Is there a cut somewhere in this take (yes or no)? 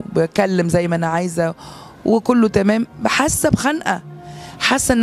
no